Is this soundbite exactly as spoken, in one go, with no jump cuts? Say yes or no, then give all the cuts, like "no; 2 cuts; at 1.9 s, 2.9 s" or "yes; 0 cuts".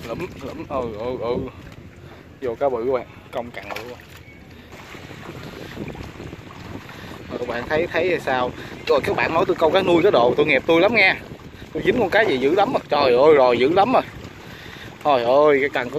no; 1 cut; at 4.7 s